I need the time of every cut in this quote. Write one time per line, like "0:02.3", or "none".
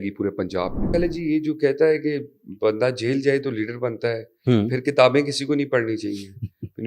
0:00.9

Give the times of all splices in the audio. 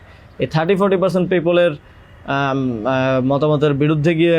none

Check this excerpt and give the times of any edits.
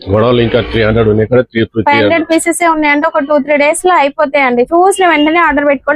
none

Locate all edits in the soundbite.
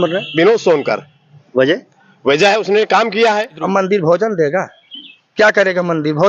0:03.6

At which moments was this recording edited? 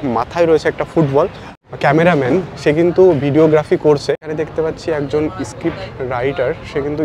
0:01.4
0:04.2

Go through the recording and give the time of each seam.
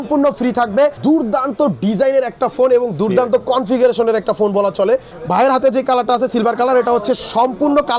0:01.0
0:05.1

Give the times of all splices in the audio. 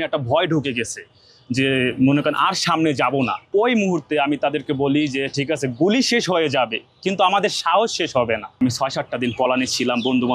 0:03.4
0:08.6

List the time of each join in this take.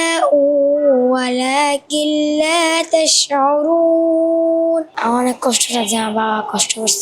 0:04.9

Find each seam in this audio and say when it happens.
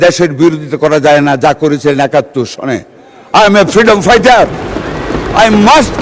none

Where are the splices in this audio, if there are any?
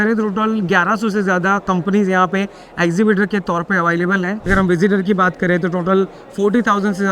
0:04.5

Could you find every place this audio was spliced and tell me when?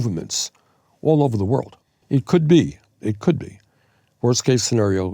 0:01.8

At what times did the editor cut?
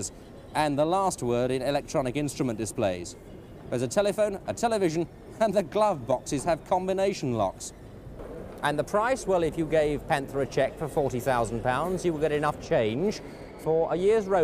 0:08.5

